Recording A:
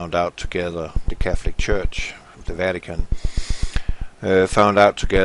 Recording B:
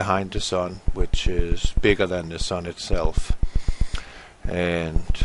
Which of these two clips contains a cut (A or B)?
A